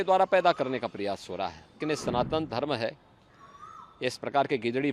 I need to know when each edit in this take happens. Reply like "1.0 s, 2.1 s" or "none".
1.7 s